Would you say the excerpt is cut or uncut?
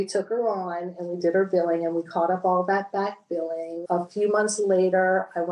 cut